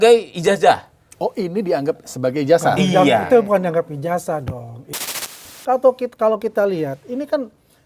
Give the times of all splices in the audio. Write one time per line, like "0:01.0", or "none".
0:05.0